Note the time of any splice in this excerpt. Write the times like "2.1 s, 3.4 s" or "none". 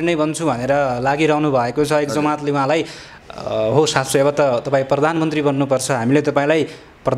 none